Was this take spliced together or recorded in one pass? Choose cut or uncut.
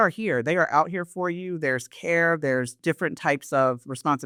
uncut